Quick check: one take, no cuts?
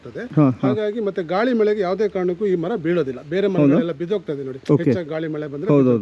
yes; 0 cuts

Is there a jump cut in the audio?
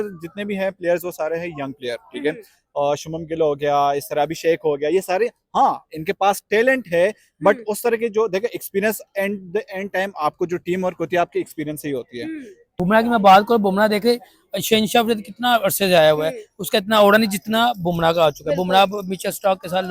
yes; 1 cut; at 12.6 s

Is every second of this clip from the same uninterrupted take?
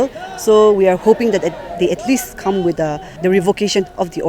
no; 1 cut; at 3.1 s

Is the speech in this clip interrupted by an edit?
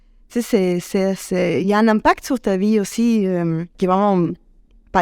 yes; 1 cut; at 3.7 s

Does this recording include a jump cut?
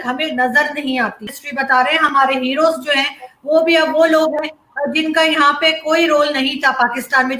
yes; 1 cut; at 1.4 s

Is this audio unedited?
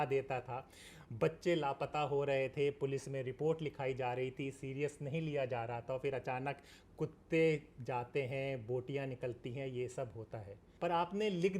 no; 1 cut; at 10.6 s

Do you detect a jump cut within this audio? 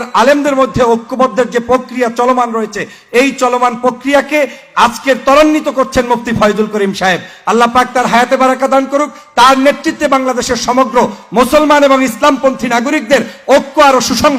no; 0 cuts

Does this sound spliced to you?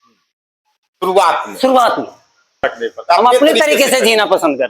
yes; 1 cut; at 2.7 s

